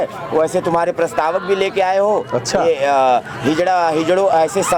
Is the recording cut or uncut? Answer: uncut